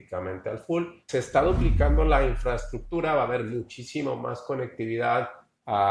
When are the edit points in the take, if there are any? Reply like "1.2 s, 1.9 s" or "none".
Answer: 1.0 s